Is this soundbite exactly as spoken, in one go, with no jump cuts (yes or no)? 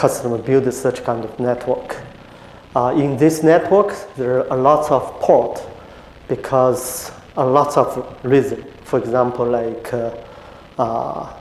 yes